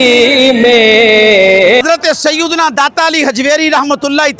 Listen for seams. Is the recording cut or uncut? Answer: cut